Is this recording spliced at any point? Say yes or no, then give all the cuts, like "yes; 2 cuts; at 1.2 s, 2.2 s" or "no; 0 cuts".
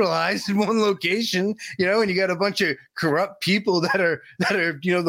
no; 0 cuts